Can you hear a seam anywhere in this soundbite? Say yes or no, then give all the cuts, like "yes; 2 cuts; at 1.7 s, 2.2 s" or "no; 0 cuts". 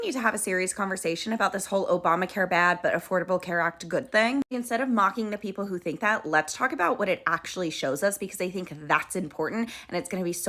no; 0 cuts